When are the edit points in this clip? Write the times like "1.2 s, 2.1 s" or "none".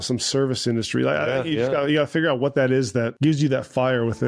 3.1 s